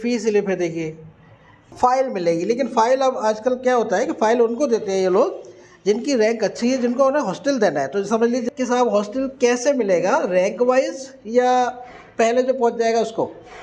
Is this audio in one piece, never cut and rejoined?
no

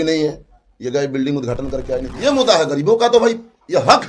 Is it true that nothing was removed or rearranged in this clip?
no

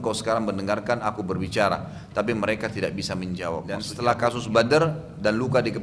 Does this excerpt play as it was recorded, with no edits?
no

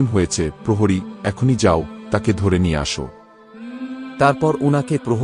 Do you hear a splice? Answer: no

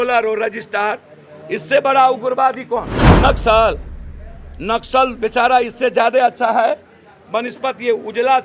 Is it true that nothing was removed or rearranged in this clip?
no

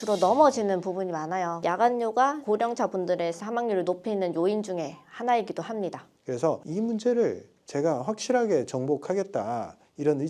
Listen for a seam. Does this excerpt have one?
yes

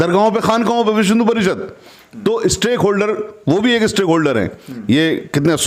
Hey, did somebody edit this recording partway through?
no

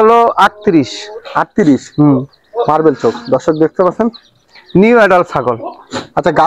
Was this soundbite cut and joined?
no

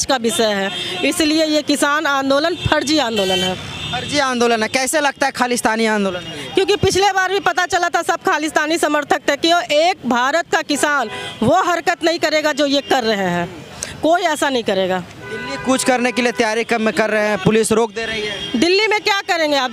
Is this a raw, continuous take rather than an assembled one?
yes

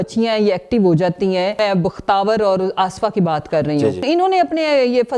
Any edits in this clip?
yes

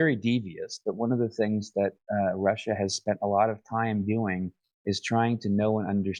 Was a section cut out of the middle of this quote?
no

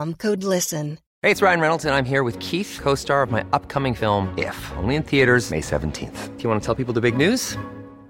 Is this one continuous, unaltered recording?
no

